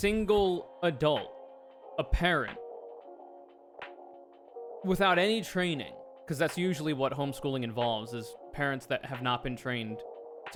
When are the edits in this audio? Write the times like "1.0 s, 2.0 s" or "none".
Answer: none